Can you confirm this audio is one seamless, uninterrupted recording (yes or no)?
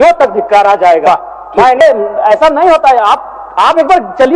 no